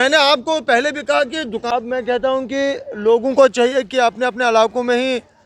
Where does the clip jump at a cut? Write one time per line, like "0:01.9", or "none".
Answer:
0:01.6